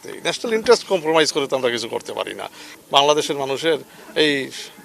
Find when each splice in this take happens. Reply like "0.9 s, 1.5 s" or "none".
2.7 s